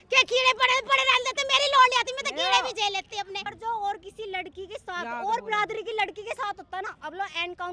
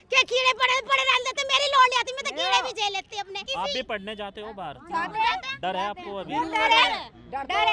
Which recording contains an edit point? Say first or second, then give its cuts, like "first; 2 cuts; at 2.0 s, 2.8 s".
second; 1 cut; at 3.4 s